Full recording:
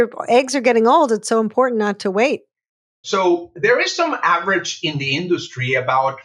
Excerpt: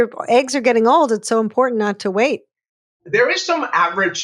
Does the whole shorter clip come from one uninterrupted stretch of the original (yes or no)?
no